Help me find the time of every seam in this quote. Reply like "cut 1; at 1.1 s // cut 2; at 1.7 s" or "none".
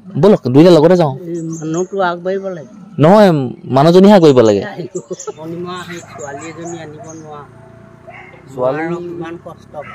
cut 1; at 5.4 s